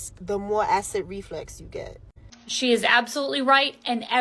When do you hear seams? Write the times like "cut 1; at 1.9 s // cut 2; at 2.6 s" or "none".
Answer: cut 1; at 2.4 s